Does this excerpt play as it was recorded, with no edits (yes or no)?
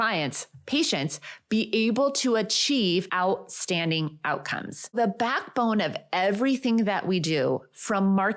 no